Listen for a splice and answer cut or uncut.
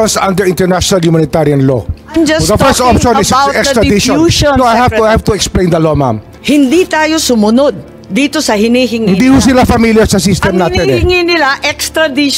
cut